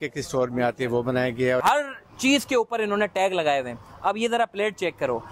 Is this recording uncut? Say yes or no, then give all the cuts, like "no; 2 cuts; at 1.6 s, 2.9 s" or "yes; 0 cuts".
no; 1 cut; at 1.6 s